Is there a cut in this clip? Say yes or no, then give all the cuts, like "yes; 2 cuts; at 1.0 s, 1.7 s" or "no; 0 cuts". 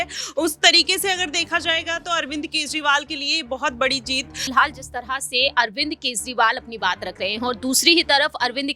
yes; 1 cut; at 4.4 s